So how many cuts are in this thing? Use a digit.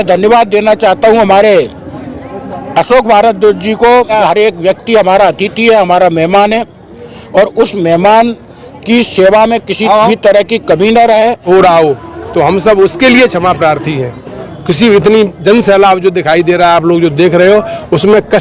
2